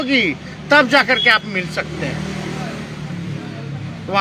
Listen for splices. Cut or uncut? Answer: uncut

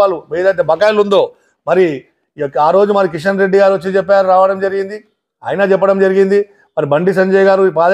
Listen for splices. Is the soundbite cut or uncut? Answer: uncut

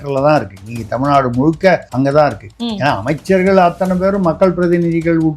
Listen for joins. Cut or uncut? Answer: cut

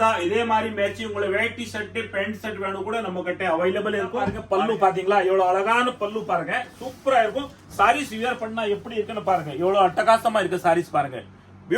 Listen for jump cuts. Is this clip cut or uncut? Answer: cut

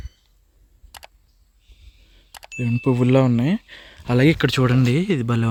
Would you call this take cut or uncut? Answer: uncut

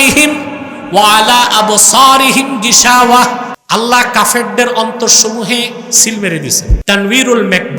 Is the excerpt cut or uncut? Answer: cut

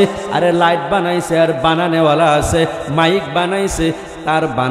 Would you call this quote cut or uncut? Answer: uncut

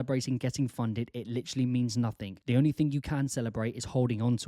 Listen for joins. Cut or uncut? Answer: cut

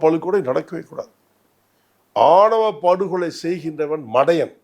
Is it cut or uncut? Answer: uncut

